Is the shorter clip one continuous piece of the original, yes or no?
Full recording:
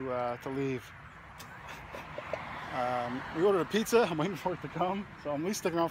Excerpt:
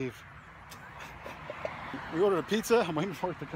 no